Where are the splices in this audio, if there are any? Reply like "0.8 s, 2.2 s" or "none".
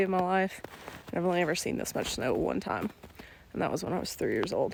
none

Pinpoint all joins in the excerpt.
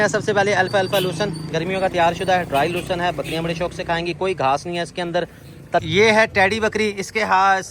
5.8 s

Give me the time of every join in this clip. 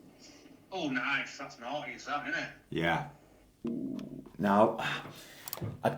3.6 s

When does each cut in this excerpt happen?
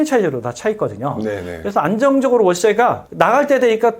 3.0 s

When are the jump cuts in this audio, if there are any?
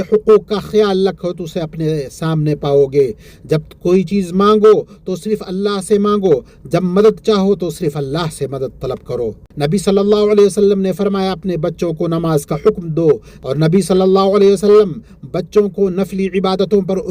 9.5 s, 13.3 s

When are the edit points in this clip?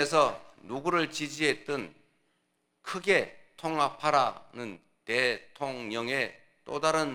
none

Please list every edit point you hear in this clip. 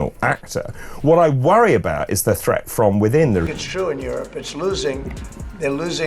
3.6 s

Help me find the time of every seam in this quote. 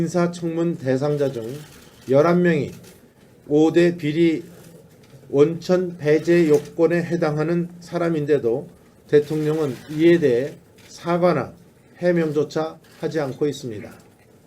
5.0 s

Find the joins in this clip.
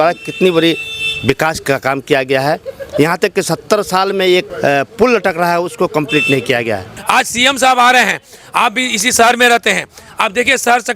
4.5 s, 6.9 s

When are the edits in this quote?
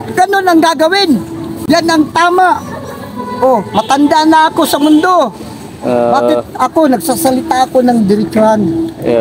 none

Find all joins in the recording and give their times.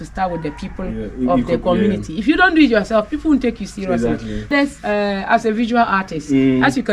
4.5 s

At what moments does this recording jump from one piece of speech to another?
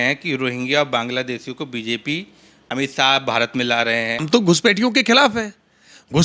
2.6 s, 4.3 s

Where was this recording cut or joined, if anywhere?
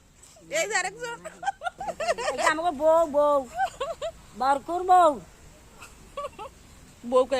2.1 s

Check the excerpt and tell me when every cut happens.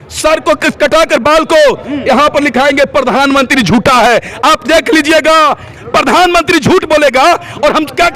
5.7 s

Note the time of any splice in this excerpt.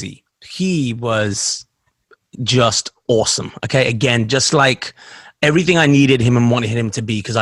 none

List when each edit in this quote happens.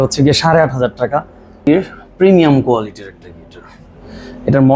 1.7 s

